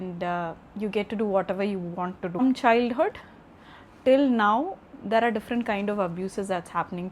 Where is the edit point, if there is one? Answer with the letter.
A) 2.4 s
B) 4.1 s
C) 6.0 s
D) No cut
A